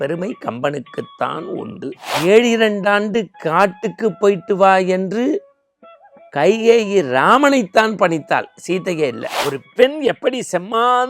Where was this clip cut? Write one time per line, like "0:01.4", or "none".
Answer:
0:02.1
0:09.3